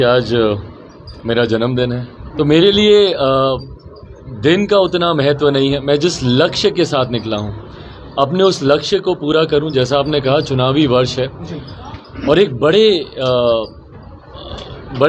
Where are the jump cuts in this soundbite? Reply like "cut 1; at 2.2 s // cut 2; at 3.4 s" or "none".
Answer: cut 1; at 2.2 s